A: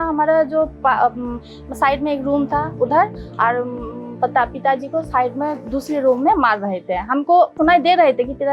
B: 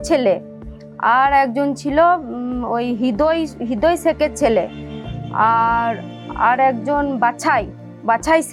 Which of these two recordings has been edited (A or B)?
A